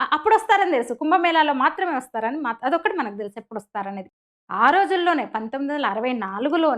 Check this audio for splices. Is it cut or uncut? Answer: cut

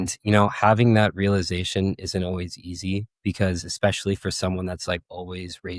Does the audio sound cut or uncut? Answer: uncut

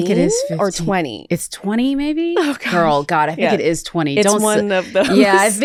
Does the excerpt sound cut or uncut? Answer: uncut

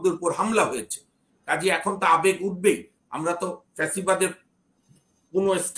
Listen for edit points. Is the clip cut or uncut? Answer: uncut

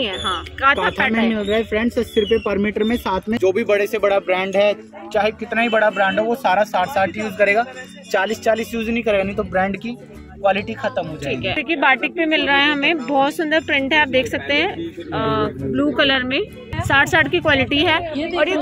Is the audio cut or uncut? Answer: cut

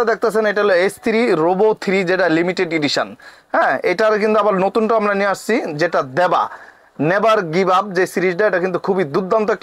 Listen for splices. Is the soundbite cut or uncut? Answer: uncut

